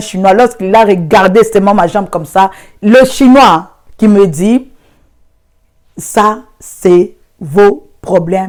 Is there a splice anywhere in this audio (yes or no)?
no